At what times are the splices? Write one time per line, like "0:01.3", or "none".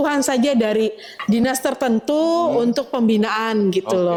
none